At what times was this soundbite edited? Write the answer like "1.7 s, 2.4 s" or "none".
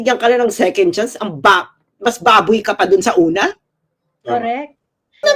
none